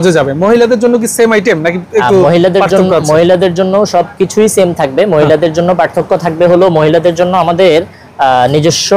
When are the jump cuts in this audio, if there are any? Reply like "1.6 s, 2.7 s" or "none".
none